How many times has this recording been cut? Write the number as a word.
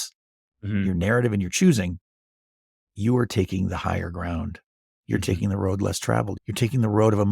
one